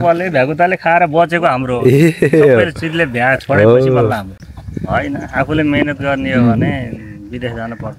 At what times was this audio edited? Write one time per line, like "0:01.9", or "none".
0:04.4

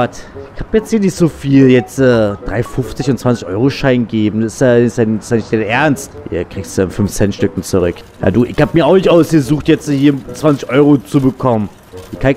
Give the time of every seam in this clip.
0:06.1
0:08.1

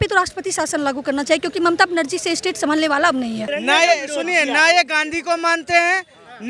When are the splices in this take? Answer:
0:03.5

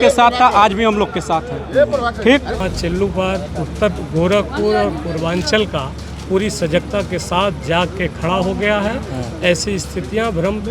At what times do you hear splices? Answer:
0:02.7

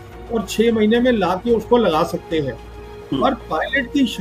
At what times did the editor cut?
none

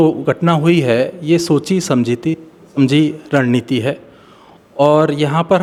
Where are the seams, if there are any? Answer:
none

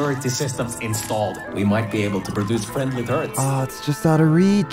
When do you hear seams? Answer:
0:01.4

